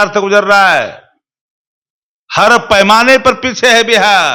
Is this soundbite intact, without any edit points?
yes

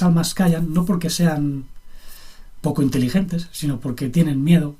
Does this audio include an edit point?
no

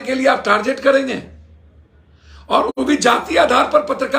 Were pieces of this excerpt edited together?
no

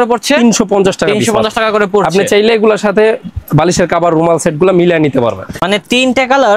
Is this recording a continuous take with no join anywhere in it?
no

